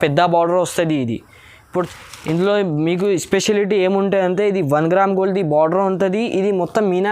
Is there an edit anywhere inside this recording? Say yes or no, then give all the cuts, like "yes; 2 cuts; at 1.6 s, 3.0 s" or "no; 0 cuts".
yes; 1 cut; at 1.7 s